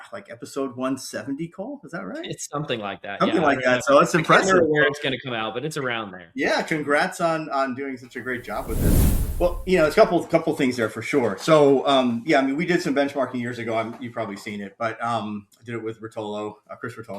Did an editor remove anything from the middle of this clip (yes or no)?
yes